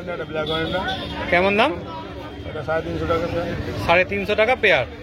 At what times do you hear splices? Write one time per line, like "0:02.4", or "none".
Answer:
none